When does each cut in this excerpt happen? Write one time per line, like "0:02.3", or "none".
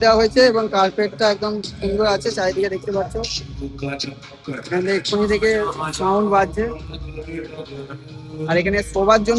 none